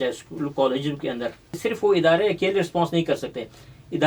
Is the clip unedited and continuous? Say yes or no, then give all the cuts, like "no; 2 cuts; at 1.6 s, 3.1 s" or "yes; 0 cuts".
no; 1 cut; at 1.6 s